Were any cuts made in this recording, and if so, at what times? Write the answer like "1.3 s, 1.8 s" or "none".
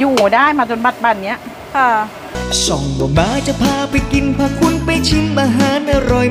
2.2 s